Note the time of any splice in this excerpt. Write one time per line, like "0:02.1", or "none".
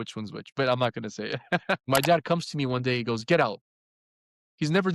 0:01.8